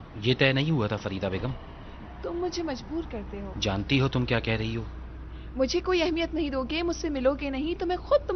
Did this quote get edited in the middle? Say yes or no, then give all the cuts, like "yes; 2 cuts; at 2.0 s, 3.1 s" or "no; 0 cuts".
yes; 1 cut; at 7.2 s